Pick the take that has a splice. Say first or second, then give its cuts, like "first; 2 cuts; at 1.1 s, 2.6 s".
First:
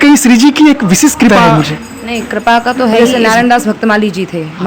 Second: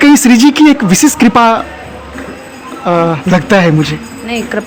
first; 2 cuts; at 1.3 s, 3.1 s